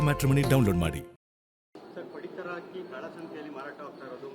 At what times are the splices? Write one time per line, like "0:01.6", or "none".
0:01.6